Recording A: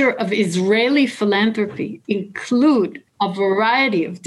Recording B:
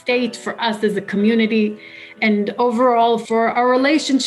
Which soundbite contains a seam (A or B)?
A